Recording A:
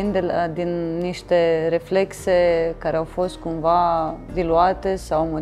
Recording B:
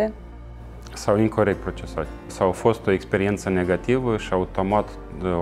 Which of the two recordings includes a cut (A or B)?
B